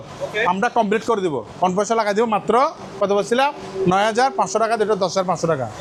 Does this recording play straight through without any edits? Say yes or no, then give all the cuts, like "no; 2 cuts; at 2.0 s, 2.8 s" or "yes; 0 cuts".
yes; 0 cuts